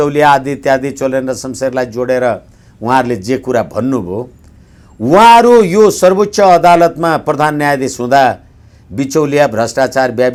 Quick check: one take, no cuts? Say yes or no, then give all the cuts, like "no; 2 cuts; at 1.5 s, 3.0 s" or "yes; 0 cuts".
yes; 0 cuts